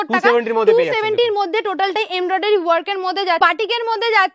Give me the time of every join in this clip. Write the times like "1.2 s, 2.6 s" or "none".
3.4 s